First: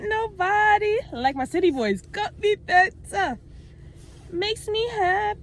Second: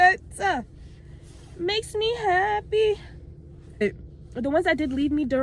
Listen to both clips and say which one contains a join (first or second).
second